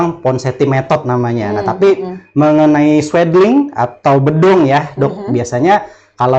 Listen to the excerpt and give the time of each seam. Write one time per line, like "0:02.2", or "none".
none